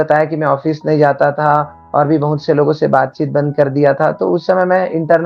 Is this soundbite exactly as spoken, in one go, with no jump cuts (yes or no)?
yes